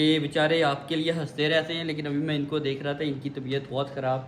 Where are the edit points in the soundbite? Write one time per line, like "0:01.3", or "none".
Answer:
none

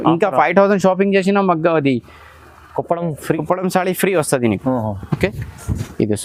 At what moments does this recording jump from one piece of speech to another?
none

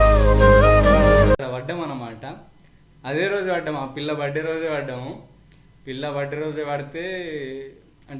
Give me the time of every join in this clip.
0:01.3

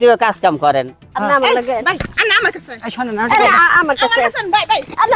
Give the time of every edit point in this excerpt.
0:01.1

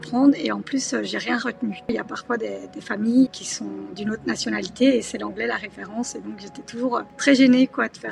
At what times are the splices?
0:01.9
0:03.5
0:07.1

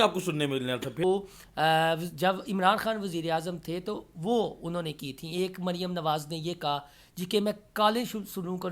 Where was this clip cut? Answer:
0:01.0

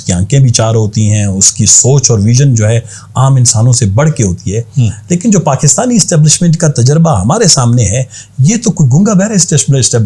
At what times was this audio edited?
none

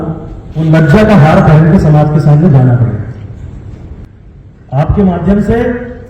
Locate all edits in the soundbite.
0:04.1

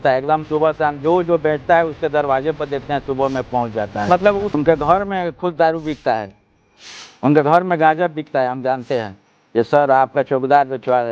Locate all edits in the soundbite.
0:04.5
0:09.4

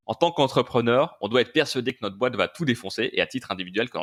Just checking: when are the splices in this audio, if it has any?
none

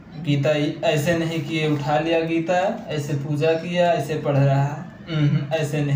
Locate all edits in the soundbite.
none

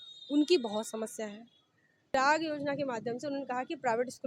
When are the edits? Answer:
0:02.1

